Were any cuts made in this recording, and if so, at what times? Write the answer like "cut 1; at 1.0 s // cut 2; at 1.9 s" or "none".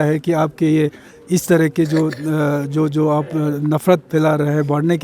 none